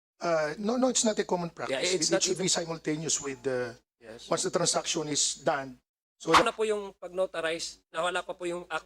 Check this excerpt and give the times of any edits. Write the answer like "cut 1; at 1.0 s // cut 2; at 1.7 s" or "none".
cut 1; at 6.4 s